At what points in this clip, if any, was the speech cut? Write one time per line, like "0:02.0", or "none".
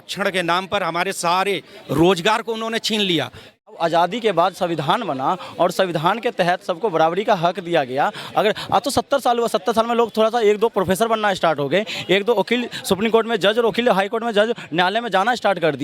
0:03.7